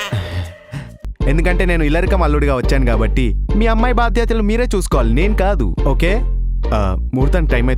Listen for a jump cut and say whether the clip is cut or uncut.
cut